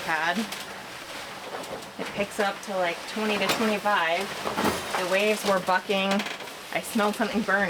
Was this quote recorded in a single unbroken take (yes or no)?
yes